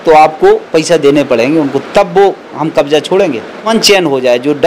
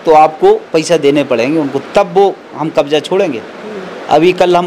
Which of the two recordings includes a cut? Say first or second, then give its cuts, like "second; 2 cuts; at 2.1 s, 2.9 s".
first; 1 cut; at 3.7 s